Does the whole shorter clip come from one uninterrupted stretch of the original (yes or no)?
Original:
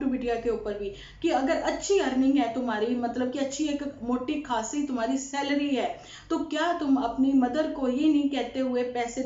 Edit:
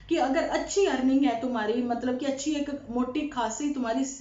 yes